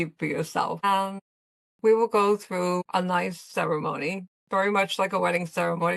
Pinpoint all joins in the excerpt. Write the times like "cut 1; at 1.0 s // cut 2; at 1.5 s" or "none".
cut 1; at 0.8 s // cut 2; at 2.8 s // cut 3; at 4.3 s